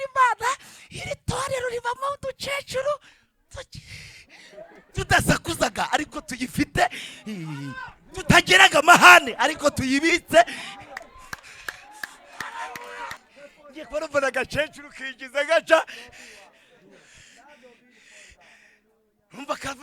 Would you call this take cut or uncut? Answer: cut